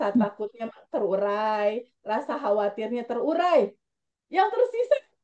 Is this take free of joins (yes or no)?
yes